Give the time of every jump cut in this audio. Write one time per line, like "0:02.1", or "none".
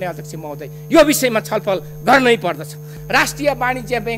0:02.9